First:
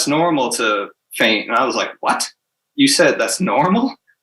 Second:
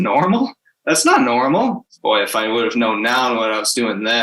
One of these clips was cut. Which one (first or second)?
second